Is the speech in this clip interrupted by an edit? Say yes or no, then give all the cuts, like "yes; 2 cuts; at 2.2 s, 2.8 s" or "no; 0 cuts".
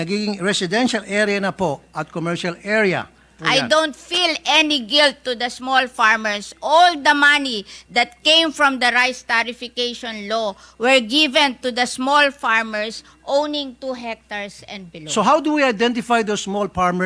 yes; 1 cut; at 3.3 s